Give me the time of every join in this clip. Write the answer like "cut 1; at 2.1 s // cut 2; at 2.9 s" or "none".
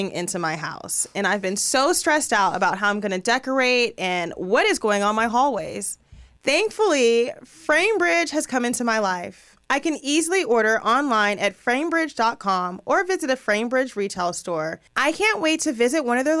cut 1; at 14.8 s

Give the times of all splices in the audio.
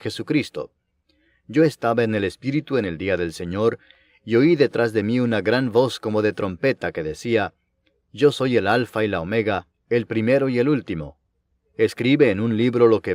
none

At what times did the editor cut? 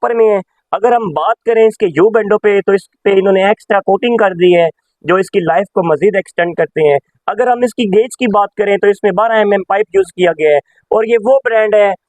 none

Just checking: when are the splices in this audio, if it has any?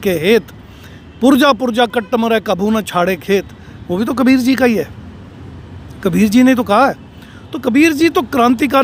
none

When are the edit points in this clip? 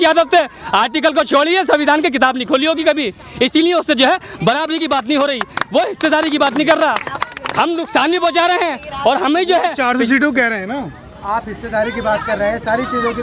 none

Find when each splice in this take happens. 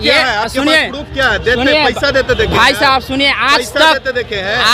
none

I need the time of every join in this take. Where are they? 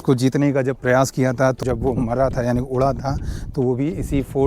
cut 1; at 1.6 s

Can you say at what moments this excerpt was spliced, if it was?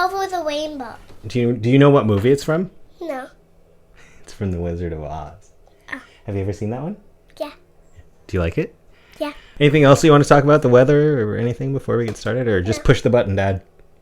cut 1; at 2.8 s // cut 2; at 9.4 s

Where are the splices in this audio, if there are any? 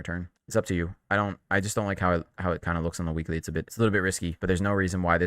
cut 1; at 3.7 s // cut 2; at 4.3 s

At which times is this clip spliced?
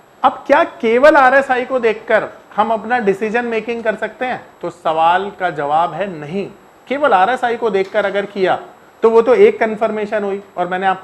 none

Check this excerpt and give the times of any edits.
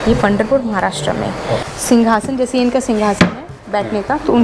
cut 1; at 1.6 s

